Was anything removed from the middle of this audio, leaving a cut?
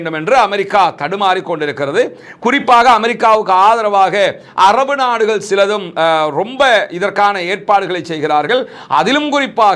no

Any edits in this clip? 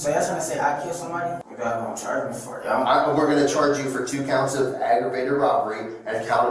yes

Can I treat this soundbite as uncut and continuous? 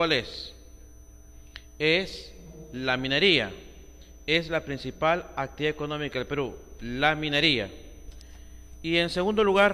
no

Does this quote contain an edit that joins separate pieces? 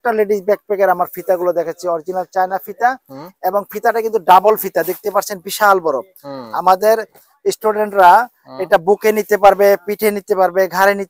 no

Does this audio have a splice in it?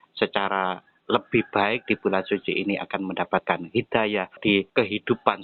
yes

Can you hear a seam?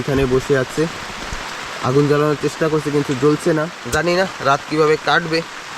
yes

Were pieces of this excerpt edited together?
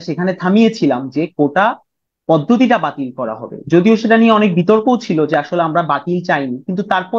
no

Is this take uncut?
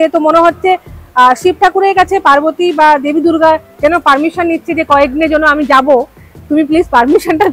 yes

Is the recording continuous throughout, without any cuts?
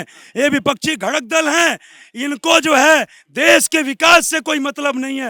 yes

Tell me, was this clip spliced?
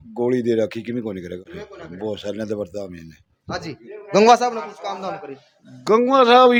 no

